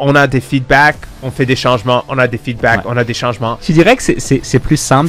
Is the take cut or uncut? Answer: cut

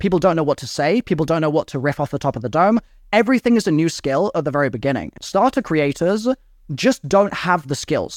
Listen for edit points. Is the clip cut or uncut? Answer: cut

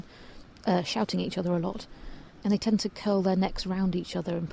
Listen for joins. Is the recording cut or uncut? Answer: cut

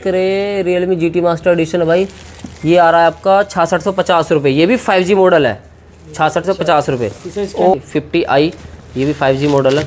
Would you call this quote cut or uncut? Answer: cut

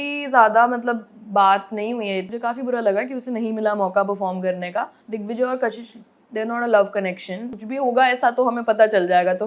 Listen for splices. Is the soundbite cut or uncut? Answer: cut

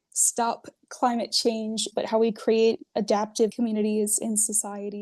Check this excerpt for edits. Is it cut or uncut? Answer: cut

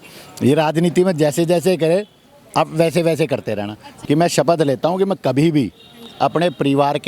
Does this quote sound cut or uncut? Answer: cut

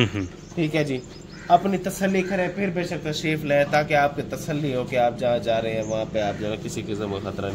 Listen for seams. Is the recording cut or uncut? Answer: uncut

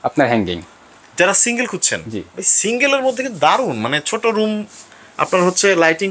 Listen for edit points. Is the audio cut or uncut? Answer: uncut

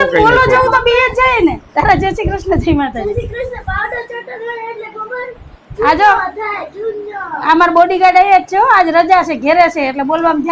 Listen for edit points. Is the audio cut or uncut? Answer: uncut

